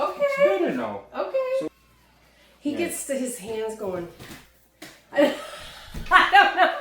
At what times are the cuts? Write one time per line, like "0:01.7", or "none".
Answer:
0:01.7